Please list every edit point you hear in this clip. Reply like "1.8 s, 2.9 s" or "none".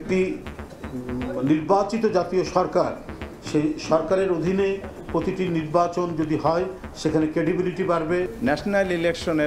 8.3 s